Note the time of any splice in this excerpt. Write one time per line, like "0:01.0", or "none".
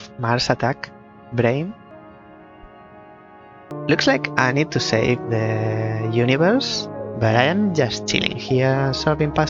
0:01.9
0:03.7

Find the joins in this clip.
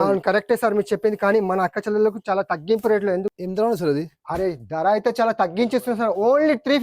0:03.3

